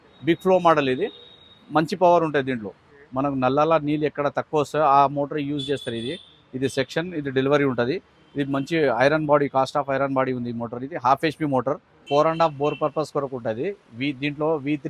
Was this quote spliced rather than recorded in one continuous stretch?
yes; 2 cuts; at 2.7 s, 12.0 s

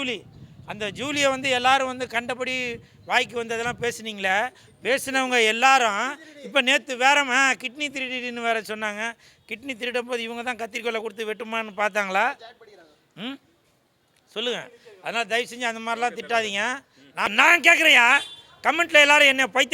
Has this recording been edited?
yes; 1 cut; at 17.3 s

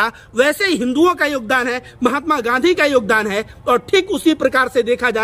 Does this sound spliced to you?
no; 0 cuts

